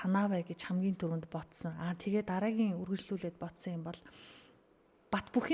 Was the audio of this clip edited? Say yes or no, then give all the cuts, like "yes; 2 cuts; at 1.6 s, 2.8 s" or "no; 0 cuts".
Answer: no; 0 cuts